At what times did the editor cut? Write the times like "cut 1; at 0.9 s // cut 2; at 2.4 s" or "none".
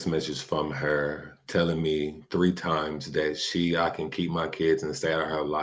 none